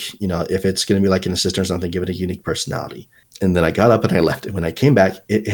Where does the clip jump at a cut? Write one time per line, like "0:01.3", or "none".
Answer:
0:03.2